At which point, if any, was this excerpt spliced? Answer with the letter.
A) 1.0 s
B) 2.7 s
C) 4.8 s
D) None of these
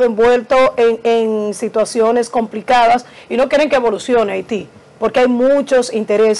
D